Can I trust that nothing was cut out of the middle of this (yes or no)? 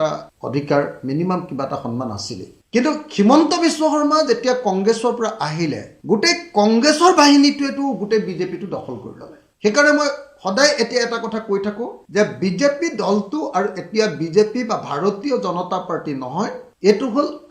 yes